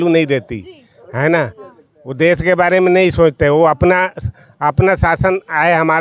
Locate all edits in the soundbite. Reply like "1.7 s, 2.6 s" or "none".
none